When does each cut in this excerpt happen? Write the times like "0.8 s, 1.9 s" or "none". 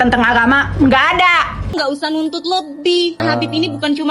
1.7 s, 3.2 s